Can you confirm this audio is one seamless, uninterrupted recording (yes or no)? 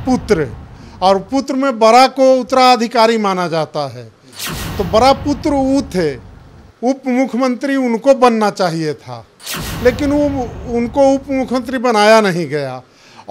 yes